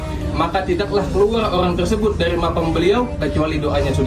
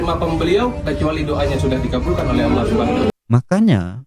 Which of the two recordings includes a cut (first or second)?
second